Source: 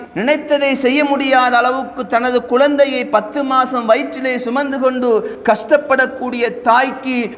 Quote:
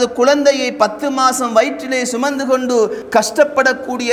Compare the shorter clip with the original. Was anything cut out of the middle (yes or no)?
no